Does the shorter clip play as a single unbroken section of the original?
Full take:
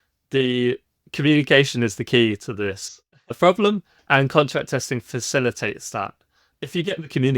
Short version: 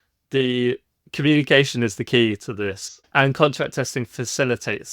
no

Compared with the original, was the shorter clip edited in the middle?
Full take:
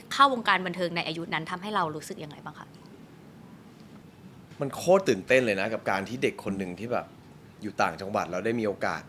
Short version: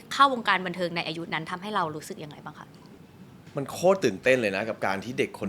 yes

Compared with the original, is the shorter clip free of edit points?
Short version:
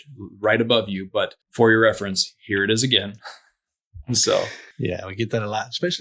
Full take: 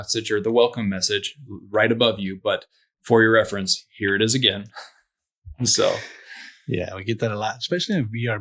no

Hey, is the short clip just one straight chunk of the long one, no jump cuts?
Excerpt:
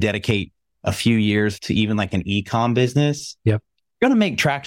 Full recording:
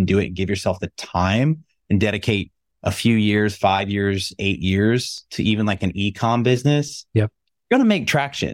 no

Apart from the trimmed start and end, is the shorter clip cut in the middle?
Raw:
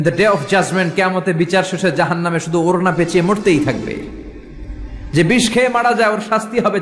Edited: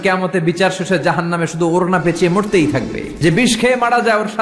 yes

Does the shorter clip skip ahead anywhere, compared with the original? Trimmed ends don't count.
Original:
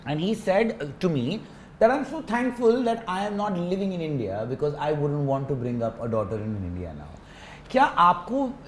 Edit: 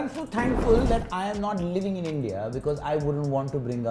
no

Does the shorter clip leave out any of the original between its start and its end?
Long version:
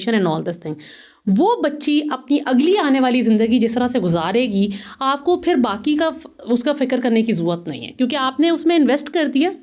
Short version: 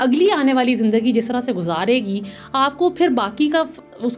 no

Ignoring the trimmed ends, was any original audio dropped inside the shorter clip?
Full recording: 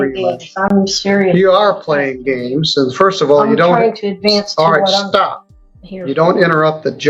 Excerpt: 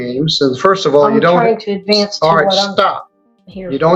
no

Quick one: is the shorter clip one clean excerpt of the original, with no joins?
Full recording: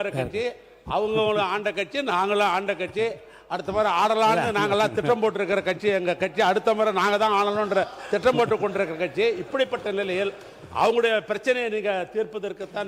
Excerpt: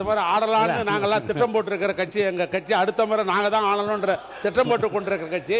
yes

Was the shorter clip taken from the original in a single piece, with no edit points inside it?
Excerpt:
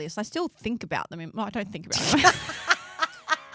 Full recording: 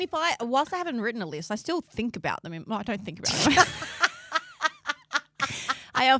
yes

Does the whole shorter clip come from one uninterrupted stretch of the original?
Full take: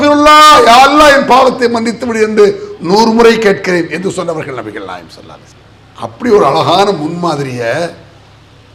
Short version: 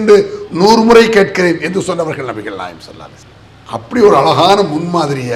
yes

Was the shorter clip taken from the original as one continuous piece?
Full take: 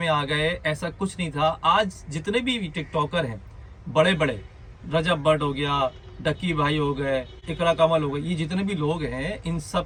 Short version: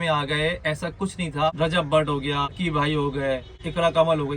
no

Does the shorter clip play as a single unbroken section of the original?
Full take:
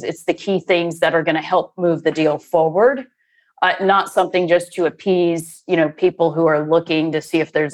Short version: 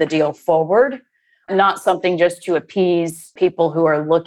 no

